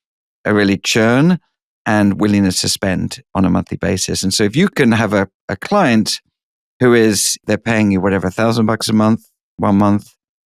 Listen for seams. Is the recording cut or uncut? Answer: uncut